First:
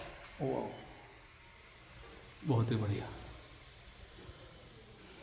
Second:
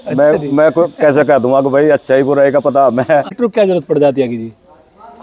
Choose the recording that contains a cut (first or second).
second